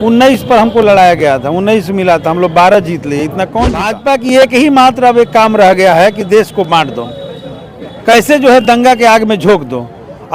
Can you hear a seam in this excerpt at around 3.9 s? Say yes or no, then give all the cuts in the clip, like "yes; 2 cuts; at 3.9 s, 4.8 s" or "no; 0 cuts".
yes; 1 cut; at 3.9 s